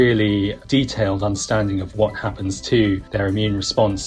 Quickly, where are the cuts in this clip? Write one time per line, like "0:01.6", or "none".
0:03.1